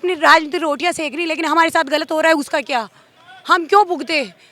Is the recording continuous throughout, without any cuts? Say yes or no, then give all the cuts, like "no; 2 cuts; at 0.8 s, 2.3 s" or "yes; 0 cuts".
yes; 0 cuts